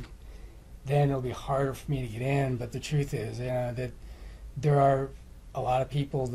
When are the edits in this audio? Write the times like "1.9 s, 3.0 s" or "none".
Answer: none